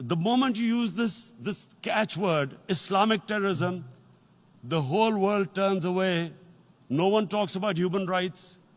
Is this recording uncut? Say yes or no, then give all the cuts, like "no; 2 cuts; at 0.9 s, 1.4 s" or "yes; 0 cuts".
yes; 0 cuts